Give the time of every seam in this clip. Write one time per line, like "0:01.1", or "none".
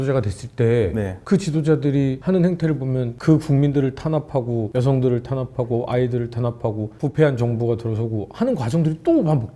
none